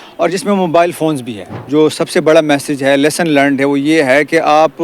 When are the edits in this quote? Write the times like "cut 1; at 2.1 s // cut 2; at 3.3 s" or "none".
cut 1; at 1.6 s